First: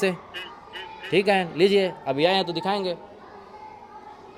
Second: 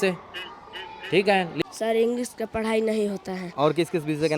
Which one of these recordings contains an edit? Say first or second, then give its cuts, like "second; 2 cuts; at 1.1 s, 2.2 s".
second; 1 cut; at 1.6 s